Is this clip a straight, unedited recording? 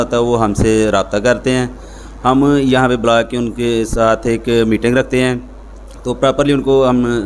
yes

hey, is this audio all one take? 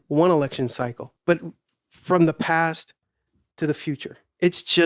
no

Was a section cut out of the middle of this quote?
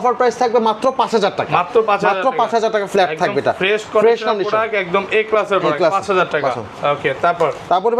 no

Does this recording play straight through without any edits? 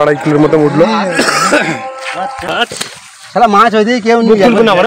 no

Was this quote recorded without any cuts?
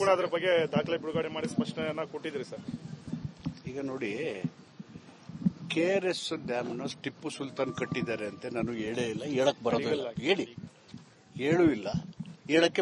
yes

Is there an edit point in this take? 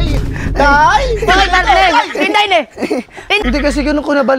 yes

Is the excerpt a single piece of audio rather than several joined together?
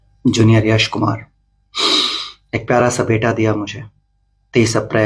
yes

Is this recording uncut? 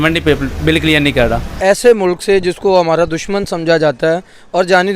no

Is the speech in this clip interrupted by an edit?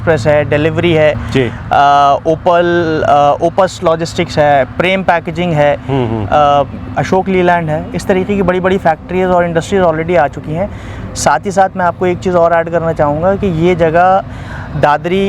no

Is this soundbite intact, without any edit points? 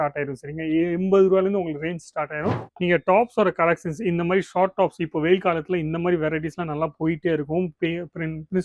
no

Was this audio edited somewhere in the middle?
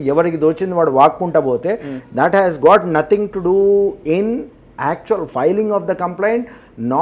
no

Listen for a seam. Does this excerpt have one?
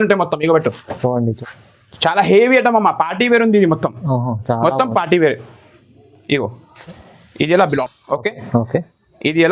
yes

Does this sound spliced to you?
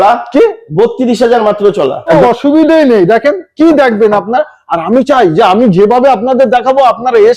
yes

